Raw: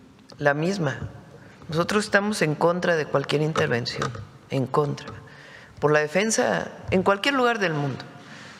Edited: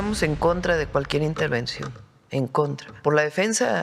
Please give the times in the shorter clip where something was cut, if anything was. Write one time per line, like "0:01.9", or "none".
0:02.9